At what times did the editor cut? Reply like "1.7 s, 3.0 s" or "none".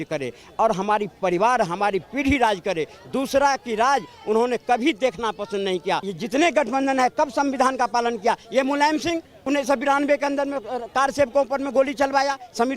6.1 s